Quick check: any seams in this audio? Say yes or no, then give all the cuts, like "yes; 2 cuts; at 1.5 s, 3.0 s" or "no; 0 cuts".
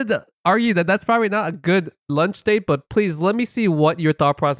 yes; 1 cut; at 2.0 s